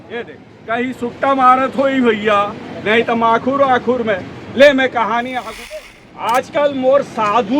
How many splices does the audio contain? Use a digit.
1